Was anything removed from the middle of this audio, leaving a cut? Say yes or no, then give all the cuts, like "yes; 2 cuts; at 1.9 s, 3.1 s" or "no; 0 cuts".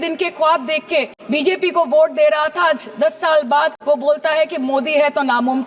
yes; 2 cuts; at 1.2 s, 3.8 s